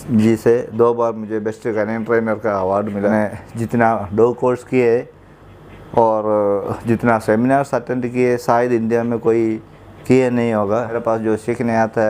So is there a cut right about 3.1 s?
yes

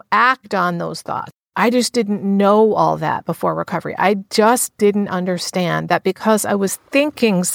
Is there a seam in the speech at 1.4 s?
yes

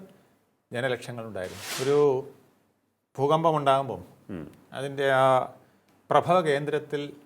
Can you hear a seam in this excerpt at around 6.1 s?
no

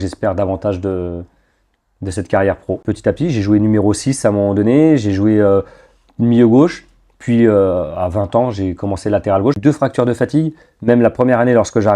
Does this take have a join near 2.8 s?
yes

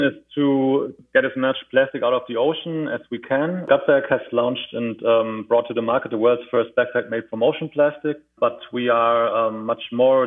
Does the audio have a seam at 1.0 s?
yes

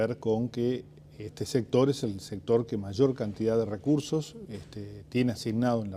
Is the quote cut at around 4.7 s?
no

